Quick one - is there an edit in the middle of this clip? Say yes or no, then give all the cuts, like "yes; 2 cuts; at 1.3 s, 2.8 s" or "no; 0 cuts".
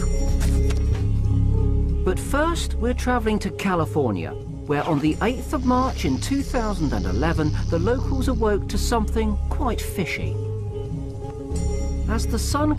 yes; 1 cut; at 11.4 s